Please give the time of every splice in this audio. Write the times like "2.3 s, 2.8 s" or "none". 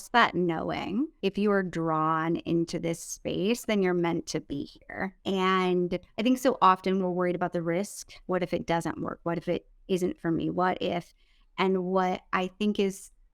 1.1 s, 6.1 s